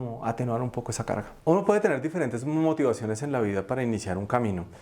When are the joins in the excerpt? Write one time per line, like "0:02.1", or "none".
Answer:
0:01.3